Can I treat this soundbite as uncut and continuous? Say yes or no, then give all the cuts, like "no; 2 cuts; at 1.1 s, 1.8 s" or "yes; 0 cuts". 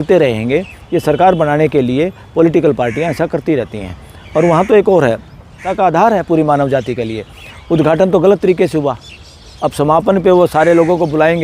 no; 1 cut; at 5.6 s